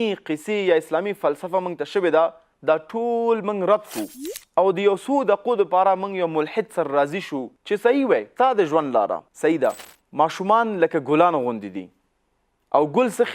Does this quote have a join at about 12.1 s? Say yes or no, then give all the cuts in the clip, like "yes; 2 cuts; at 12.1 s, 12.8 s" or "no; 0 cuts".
no; 2 cuts; at 8.3 s, 9.9 s